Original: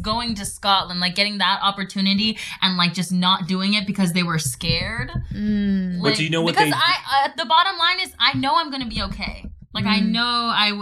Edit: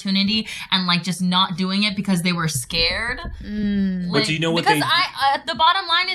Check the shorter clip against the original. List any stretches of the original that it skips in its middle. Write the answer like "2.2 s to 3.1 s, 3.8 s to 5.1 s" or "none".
none

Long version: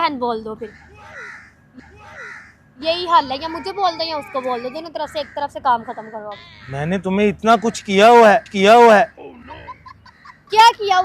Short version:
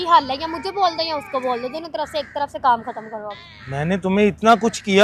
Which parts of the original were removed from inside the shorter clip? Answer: none

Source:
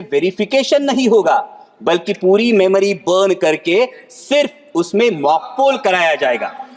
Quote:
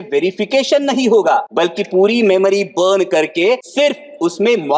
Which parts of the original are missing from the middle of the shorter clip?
1.5 s to 1.8 s, 4.0 s to 4.2 s

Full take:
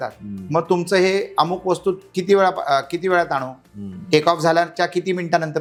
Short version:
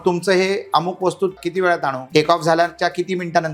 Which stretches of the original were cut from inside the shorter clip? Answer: 2.2 s to 3.5 s

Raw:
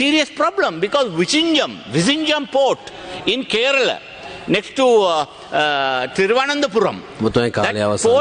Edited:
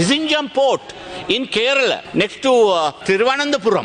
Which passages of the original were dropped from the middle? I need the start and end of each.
4.0 s to 4.4 s, 5.3 s to 6.1 s

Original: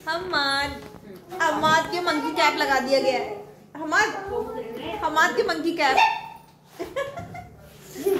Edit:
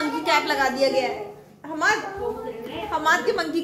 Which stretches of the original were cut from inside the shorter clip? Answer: none

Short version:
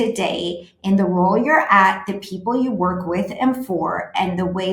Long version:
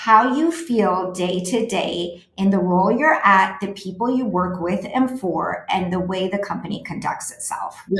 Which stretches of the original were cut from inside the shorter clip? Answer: none

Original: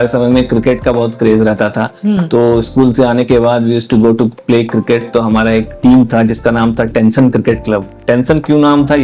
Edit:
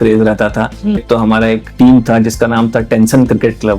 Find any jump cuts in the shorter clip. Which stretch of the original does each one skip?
2.2 s to 5.1 s

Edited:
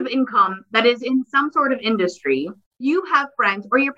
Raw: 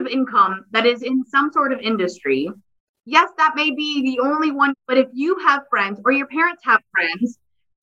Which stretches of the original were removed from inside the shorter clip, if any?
2.8 s to 5.1 s

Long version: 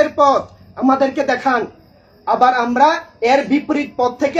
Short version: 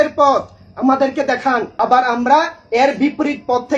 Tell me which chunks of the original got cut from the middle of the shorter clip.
1.7 s to 2.2 s

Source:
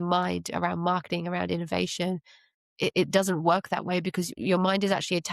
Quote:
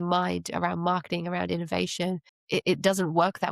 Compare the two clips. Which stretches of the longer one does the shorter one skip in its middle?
2.3 s to 2.6 s

